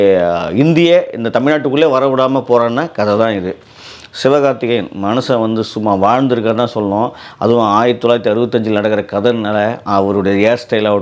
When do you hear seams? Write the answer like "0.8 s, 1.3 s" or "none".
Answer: none